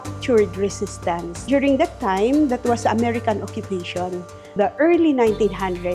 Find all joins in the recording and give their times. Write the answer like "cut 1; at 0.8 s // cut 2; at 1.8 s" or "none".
cut 1; at 1.3 s // cut 2; at 4.5 s